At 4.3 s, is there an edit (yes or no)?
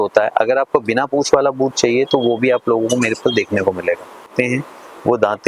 yes